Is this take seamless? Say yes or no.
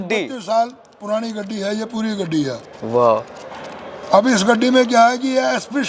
yes